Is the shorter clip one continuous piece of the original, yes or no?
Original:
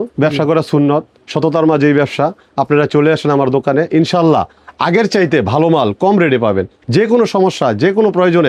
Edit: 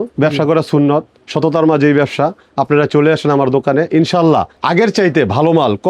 no